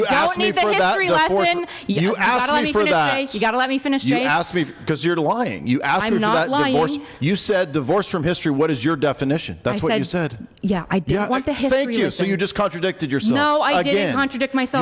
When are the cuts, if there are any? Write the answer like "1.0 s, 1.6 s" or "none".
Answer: none